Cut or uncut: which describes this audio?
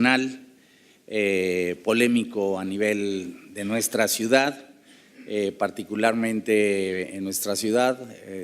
cut